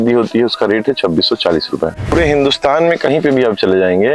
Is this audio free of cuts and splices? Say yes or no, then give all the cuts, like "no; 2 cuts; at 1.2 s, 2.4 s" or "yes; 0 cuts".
no; 1 cut; at 2.1 s